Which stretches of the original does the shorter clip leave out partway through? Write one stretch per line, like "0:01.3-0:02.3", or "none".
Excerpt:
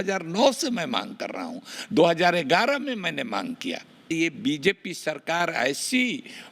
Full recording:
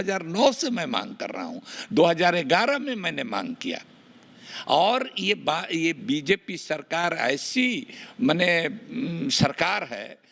0:04.0-0:05.7